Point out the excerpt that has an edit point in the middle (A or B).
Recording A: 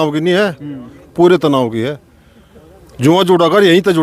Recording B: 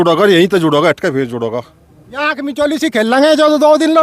B